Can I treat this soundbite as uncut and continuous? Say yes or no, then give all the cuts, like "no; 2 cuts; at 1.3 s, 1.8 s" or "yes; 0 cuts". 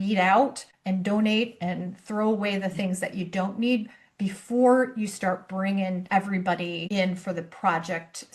no; 1 cut; at 6.8 s